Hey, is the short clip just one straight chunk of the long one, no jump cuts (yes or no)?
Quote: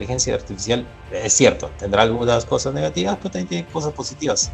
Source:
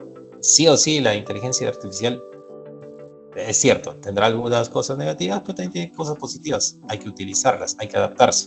no